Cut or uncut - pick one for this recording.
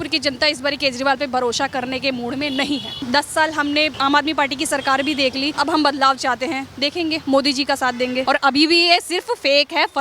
cut